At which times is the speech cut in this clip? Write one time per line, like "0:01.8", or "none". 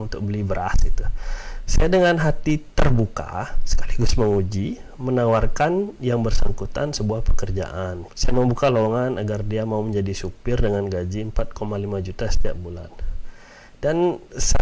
0:08.1